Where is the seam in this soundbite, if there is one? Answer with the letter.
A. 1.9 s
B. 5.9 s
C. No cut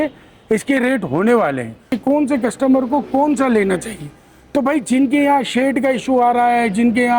A